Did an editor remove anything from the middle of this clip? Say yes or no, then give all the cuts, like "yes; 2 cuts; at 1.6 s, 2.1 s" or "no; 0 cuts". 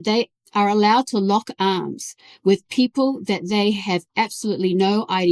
no; 0 cuts